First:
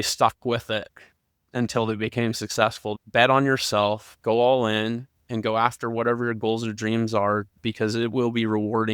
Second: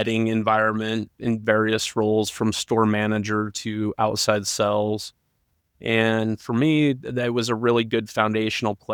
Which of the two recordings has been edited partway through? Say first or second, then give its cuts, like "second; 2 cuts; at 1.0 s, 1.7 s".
first; 1 cut; at 2.8 s